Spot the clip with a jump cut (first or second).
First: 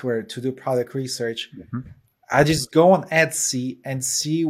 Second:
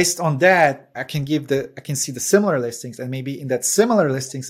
second